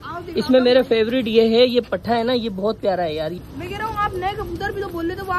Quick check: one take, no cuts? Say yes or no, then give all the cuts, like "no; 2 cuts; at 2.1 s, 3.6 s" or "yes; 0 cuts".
no; 1 cut; at 3.3 s